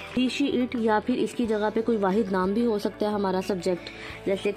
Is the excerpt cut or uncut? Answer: uncut